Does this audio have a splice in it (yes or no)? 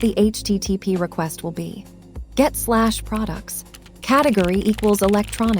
no